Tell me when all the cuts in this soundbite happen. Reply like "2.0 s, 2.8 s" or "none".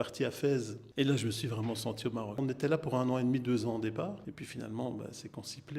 2.4 s, 4.3 s